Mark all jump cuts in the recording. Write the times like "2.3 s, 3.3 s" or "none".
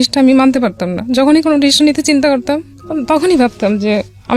none